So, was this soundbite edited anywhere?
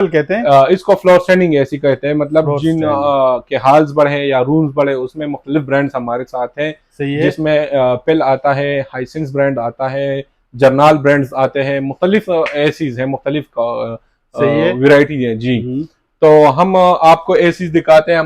no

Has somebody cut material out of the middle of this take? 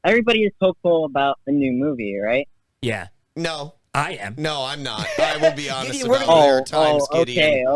no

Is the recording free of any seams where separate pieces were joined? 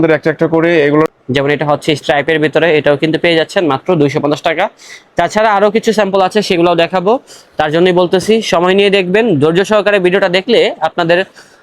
no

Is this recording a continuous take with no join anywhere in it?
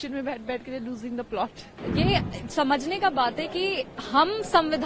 no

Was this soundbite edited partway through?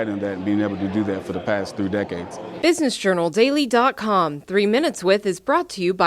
yes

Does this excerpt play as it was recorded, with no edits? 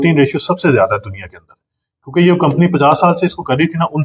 yes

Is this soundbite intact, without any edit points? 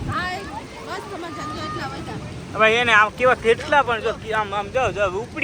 yes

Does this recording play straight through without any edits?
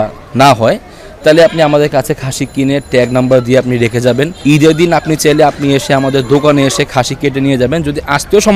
yes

